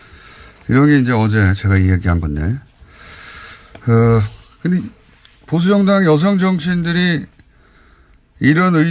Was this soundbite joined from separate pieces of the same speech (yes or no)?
no